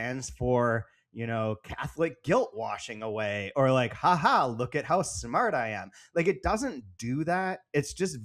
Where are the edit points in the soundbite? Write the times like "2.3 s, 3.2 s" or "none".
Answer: none